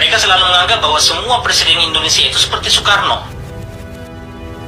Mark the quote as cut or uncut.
cut